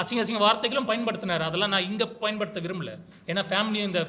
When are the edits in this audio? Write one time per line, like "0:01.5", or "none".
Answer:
none